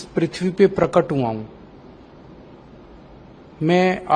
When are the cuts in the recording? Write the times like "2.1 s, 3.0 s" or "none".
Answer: none